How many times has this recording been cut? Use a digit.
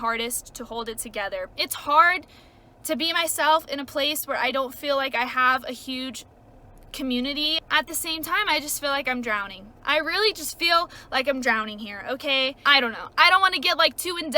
3